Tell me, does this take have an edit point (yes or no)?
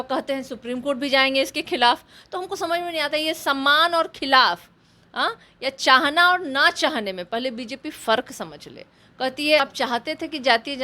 yes